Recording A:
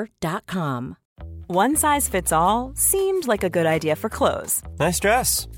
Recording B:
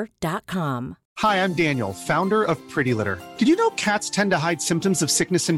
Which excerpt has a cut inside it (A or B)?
A